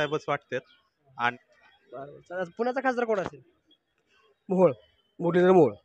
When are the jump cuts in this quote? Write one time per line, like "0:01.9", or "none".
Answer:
0:01.3